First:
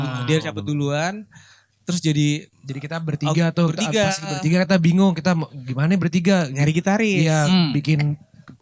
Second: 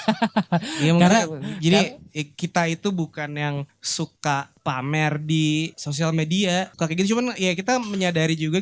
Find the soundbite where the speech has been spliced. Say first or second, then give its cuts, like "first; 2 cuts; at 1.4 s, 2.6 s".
second; 4 cuts; at 3.8 s, 4.5 s, 5.8 s, 6.7 s